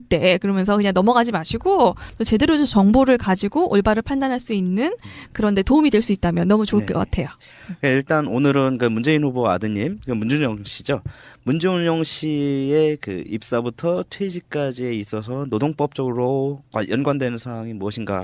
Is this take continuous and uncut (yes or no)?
no